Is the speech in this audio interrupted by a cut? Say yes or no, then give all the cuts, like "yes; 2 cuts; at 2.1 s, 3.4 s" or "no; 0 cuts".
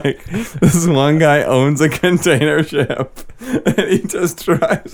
no; 0 cuts